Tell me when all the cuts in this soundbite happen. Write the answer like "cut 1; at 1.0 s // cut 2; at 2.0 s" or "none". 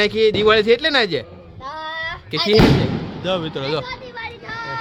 none